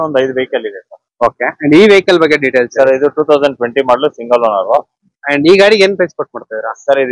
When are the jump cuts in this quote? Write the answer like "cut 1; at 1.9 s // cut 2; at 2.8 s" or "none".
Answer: cut 1; at 4.9 s